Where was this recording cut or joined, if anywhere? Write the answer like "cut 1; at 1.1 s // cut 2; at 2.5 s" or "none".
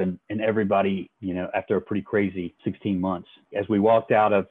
cut 1; at 1.1 s // cut 2; at 2.5 s // cut 3; at 3.5 s